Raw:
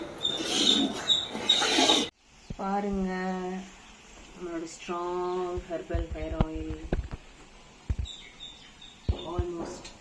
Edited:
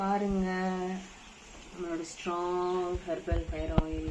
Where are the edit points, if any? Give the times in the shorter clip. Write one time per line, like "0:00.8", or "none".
none